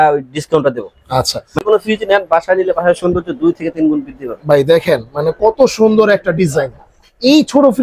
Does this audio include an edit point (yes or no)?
yes